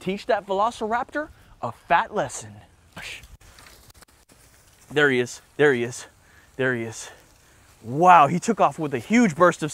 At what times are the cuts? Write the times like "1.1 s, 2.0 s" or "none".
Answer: 3.0 s

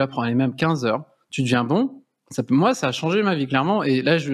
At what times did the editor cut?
none

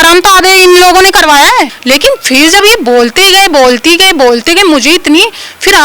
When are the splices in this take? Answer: 1.8 s

